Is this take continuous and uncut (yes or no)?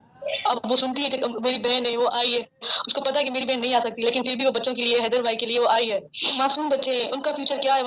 no